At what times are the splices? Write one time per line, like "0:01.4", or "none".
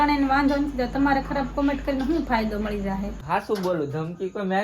0:03.2